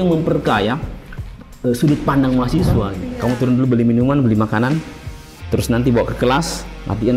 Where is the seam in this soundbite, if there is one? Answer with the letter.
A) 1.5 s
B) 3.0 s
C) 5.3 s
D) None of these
B